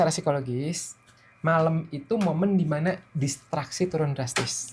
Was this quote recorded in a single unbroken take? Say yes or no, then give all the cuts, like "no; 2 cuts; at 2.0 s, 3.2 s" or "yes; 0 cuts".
yes; 0 cuts